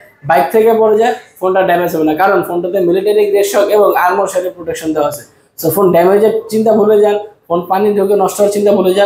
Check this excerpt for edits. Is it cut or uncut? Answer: uncut